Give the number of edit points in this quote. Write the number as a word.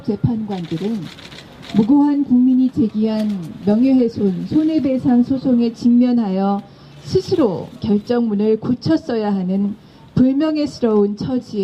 zero